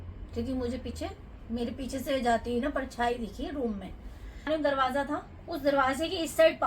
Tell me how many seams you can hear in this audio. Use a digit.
1